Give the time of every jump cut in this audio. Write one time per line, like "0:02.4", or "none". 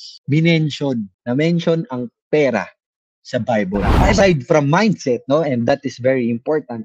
0:04.2